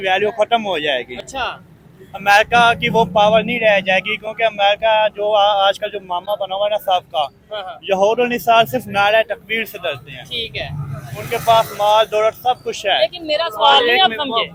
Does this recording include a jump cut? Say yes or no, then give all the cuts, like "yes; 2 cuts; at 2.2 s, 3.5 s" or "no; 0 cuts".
no; 0 cuts